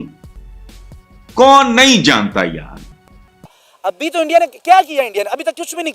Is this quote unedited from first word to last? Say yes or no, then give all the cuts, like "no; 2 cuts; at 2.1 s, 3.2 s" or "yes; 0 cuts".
no; 1 cut; at 3.4 s